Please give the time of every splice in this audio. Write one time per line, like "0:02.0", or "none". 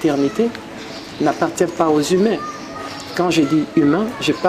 none